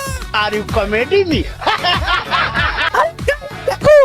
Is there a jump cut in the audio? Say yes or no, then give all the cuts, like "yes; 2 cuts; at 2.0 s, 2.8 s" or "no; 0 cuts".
no; 0 cuts